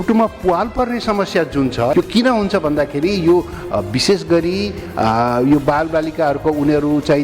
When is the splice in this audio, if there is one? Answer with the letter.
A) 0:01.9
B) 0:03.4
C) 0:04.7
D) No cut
A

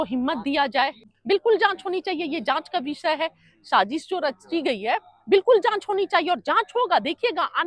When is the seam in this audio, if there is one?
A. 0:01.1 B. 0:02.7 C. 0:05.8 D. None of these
A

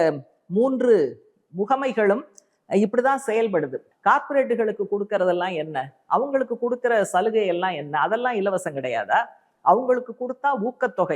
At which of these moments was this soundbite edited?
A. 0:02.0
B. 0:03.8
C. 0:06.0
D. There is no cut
B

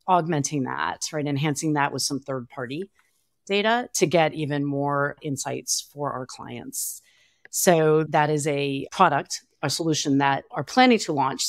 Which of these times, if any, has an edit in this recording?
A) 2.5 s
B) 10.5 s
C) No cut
B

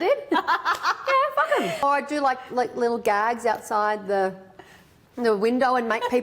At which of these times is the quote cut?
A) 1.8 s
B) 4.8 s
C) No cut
A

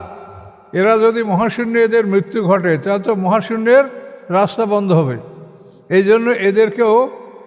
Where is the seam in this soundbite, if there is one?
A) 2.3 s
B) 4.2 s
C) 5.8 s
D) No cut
D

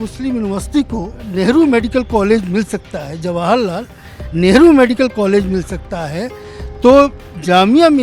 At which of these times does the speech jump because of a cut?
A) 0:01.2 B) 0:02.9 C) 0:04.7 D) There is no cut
A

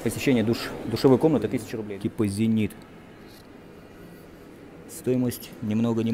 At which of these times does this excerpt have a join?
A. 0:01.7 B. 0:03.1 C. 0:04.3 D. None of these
A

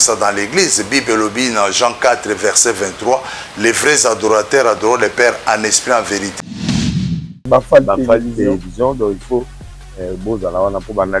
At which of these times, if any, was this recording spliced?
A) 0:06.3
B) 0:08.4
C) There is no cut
A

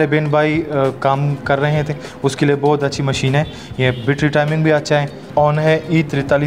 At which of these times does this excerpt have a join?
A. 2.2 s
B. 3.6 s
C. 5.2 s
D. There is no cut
C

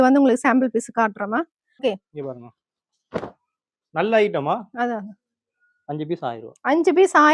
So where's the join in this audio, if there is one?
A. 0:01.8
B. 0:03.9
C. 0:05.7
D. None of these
A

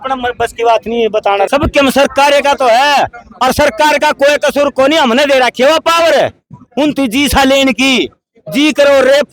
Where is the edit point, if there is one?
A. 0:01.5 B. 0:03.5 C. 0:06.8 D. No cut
A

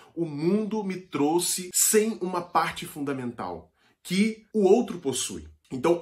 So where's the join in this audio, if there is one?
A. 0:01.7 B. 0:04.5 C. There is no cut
A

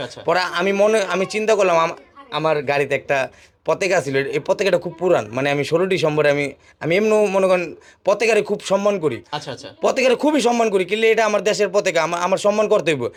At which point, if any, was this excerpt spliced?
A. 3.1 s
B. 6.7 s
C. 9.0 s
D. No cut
D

